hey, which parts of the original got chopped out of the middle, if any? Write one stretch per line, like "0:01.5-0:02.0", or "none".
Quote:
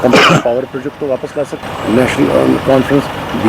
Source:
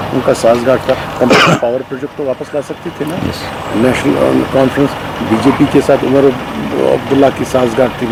0:02.8-0:03.5